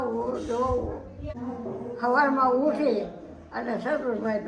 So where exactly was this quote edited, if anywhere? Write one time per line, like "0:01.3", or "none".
0:01.4